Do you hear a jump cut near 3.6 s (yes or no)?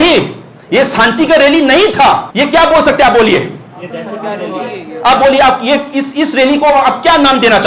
no